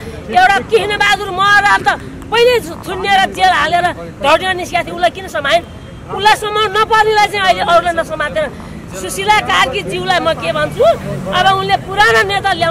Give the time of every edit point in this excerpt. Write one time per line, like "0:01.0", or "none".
none